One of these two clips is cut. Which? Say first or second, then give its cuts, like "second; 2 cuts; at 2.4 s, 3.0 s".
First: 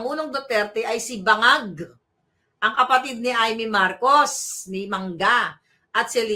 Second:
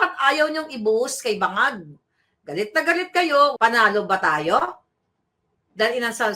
second; 1 cut; at 3.5 s